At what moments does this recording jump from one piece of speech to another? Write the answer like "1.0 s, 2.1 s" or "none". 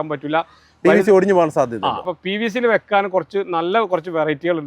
2.0 s